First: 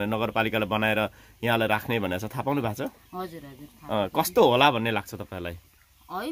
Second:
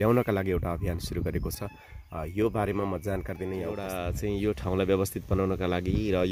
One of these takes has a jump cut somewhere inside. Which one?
second; 1 cut; at 4.0 s

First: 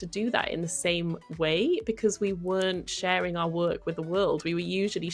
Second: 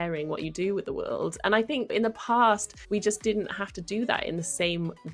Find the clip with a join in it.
second; 1 cut; at 2.7 s

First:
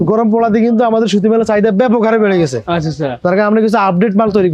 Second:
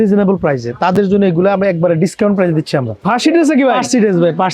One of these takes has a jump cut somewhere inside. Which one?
second; 1 cut; at 3.0 s

